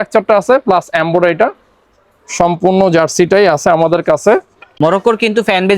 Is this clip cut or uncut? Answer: cut